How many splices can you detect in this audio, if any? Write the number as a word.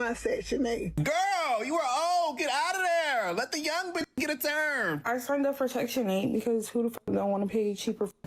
two